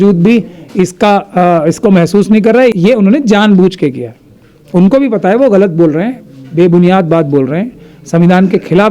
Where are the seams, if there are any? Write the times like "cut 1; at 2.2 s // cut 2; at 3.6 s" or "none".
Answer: cut 1; at 2.7 s